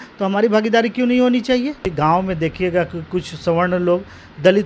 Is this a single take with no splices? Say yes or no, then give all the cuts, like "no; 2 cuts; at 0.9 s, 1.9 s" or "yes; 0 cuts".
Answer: no; 1 cut; at 1.8 s